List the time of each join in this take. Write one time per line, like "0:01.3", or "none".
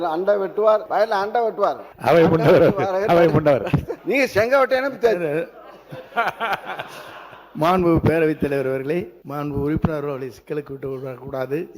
0:00.9
0:01.9
0:03.9
0:09.2